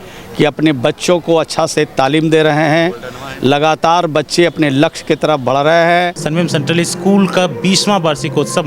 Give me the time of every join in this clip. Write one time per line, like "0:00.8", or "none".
0:06.2